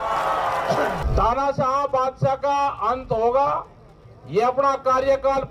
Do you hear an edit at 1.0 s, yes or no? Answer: yes